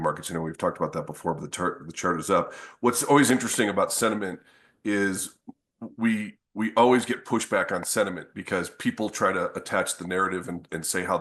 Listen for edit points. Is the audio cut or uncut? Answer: uncut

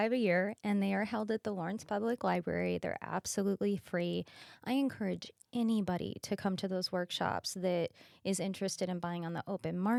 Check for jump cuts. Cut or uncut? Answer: uncut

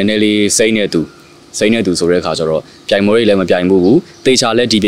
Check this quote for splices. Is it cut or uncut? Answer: uncut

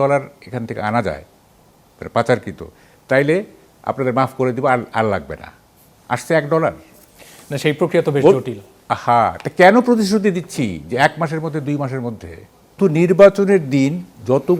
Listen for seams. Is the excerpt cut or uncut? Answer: cut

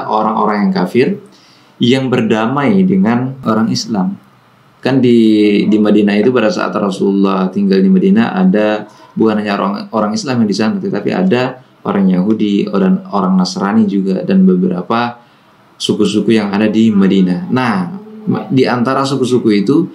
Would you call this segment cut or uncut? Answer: uncut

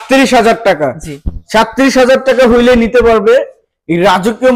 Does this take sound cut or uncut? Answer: uncut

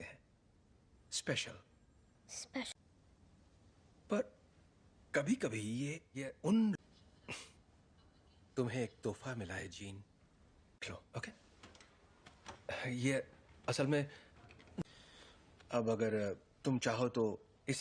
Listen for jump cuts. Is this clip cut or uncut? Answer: uncut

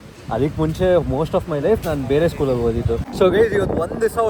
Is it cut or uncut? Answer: cut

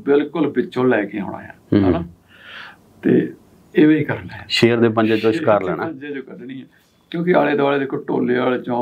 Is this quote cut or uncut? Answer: uncut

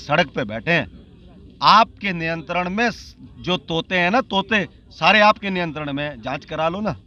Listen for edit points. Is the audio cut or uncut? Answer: uncut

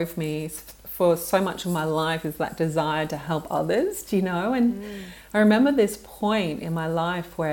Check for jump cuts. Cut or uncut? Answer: uncut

